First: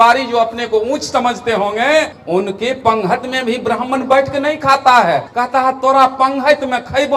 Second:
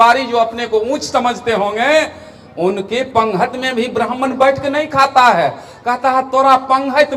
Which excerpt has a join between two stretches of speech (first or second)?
first